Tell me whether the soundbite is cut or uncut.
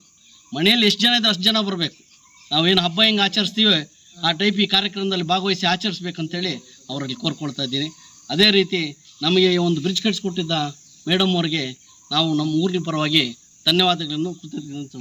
uncut